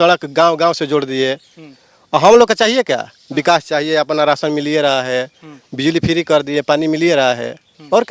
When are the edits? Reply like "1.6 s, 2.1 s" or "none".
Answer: none